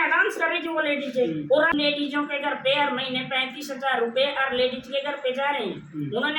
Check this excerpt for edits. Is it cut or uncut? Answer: cut